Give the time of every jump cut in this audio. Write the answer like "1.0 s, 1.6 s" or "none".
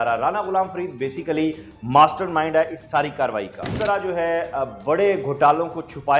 3.6 s